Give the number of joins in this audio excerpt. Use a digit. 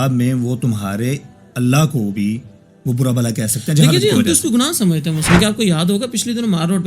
1